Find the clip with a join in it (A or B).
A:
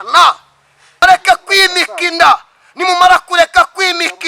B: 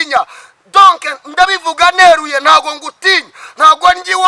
A